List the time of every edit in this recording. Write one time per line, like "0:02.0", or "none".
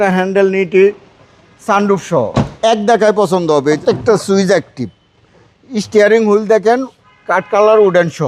0:02.5
0:03.8